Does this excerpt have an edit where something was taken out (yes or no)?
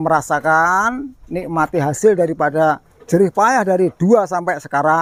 no